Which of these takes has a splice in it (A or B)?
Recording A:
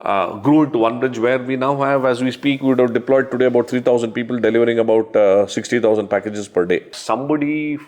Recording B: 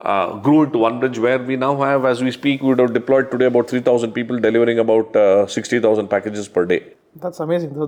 A